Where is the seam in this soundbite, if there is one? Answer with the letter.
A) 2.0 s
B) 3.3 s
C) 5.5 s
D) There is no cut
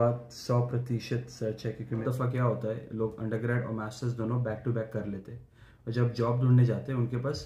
A